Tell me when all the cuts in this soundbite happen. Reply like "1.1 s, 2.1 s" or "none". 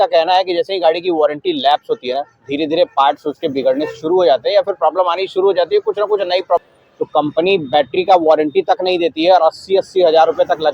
6.6 s